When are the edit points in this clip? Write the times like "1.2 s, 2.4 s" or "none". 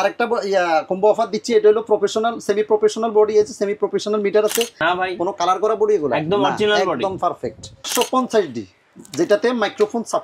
4.8 s, 7.9 s